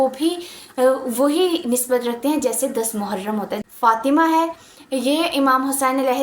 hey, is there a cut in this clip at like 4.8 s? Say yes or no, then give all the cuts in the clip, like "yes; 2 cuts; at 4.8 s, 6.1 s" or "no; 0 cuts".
no; 1 cut; at 3.6 s